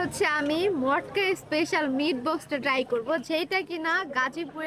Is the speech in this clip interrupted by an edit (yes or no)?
no